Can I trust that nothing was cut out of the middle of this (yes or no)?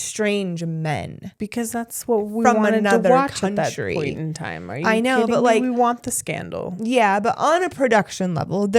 yes